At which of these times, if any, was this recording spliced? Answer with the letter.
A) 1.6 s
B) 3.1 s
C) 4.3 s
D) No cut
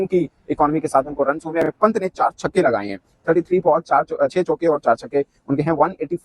A